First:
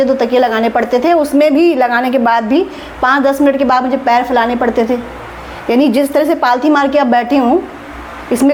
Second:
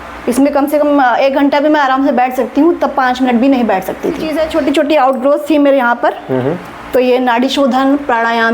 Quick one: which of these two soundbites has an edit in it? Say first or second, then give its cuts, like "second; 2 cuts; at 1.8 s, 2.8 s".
second; 1 cut; at 4.3 s